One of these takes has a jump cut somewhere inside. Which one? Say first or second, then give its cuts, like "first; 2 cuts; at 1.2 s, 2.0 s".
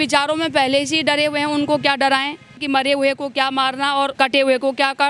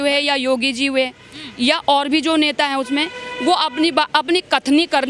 first; 2 cuts; at 2.6 s, 4.1 s